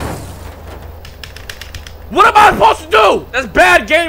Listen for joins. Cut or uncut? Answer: uncut